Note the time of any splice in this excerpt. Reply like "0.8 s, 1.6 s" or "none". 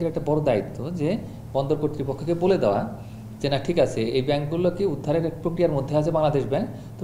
none